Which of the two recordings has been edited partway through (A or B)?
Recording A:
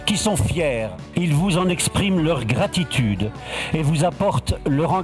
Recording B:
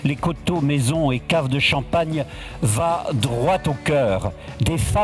A